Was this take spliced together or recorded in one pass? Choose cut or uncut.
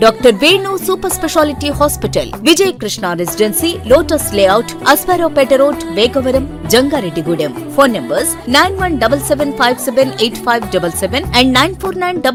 uncut